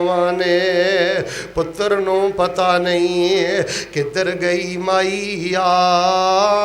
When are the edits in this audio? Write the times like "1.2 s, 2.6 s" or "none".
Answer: none